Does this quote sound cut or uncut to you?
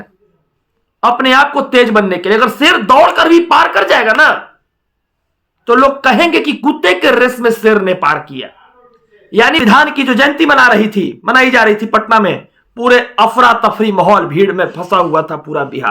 cut